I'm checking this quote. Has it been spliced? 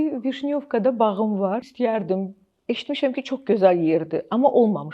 yes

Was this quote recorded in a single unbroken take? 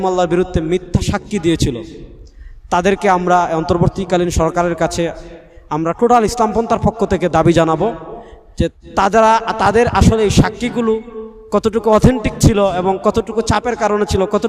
yes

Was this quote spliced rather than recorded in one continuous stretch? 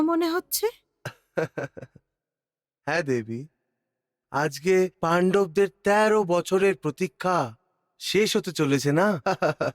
no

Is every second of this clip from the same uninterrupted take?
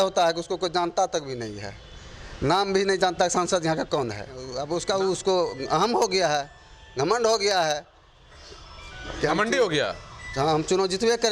no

